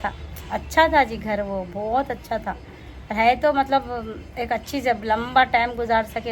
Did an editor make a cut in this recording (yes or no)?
no